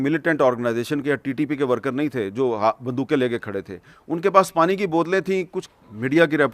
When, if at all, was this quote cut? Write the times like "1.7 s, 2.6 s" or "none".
5.6 s